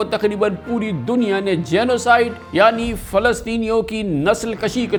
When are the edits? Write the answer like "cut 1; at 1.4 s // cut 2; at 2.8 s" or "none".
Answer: none